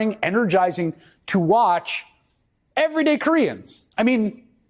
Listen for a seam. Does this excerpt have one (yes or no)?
no